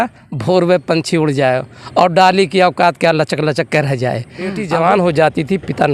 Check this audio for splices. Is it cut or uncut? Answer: cut